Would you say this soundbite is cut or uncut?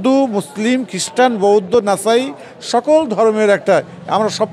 uncut